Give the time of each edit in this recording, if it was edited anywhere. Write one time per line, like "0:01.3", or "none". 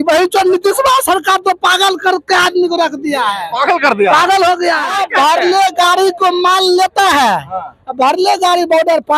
0:05.0